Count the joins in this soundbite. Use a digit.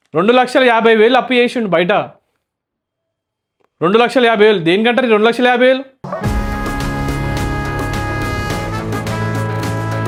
0